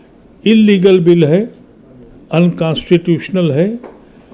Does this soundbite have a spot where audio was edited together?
no; 0 cuts

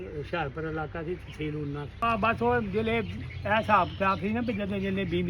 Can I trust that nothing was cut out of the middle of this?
no; 1 cut; at 1.9 s

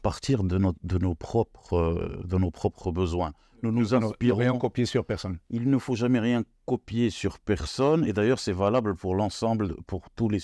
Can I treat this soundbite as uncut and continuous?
yes; 0 cuts

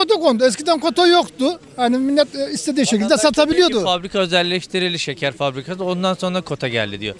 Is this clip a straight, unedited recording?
yes; 0 cuts

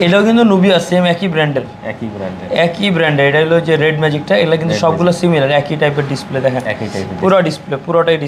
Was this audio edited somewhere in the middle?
no; 0 cuts

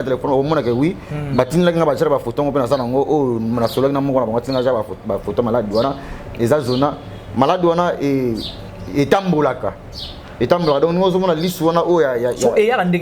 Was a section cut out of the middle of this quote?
no; 0 cuts

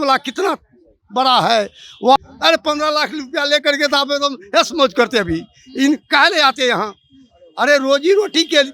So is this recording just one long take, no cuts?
no; 1 cut; at 2.2 s

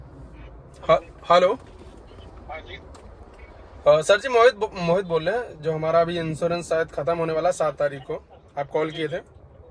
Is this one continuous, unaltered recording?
yes; 0 cuts

